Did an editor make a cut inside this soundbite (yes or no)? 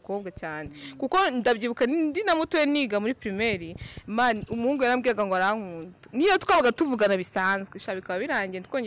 no